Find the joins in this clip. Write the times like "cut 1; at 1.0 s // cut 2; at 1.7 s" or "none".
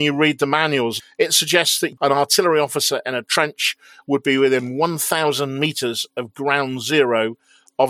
cut 1; at 1.0 s // cut 2; at 1.9 s